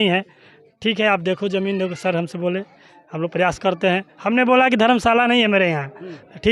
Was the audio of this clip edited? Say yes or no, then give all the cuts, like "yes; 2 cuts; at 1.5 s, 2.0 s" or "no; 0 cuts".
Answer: no; 0 cuts